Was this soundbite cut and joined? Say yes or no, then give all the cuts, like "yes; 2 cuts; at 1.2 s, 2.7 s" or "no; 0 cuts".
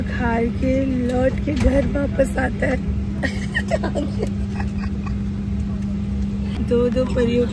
yes; 1 cut; at 6.6 s